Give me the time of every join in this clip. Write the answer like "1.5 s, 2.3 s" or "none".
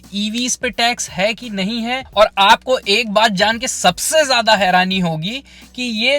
2.2 s